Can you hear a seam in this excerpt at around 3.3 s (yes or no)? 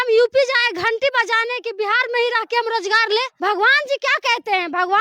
yes